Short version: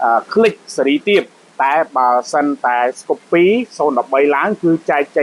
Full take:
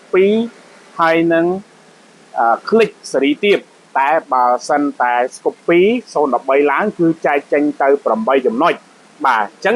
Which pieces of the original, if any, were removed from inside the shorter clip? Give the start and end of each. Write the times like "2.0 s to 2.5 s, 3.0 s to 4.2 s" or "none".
none